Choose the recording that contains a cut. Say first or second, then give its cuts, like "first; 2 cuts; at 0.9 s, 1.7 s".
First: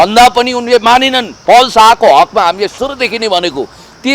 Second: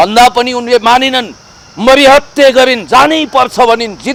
first; 1 cut; at 1.3 s